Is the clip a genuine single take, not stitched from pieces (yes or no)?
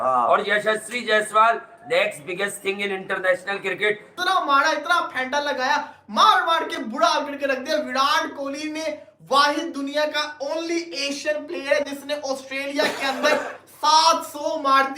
no